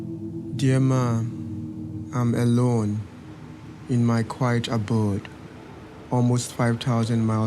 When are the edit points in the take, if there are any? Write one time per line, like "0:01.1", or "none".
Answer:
0:04.8